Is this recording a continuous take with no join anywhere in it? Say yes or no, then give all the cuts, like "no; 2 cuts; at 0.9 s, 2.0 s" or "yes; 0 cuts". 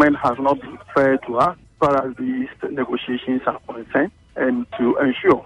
yes; 0 cuts